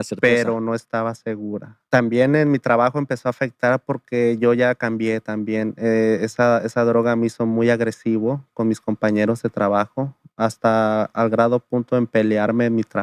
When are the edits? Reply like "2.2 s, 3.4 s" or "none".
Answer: 1.7 s